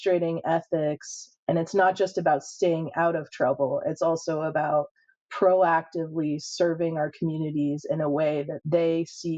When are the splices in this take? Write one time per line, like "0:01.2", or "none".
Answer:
none

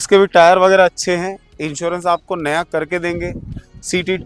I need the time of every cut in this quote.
none

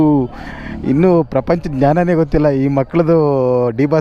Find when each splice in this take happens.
none

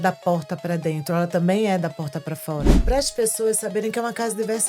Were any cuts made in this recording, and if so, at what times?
0:02.8

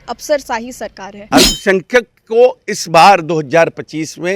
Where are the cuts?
0:01.1

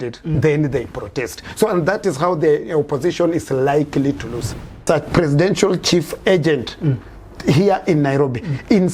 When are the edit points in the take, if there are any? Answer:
0:04.8

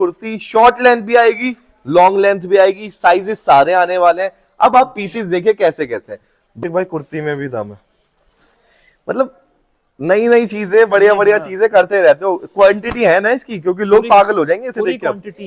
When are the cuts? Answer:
0:06.5

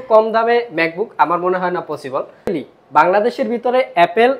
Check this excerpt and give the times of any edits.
0:02.5

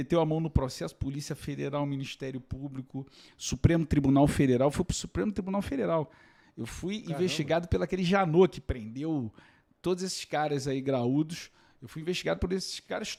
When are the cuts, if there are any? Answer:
none

